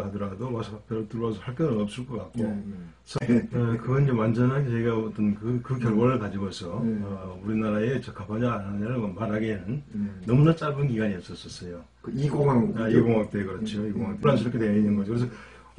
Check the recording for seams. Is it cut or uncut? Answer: cut